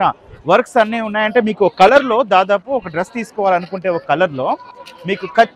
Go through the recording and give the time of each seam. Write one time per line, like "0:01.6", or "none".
none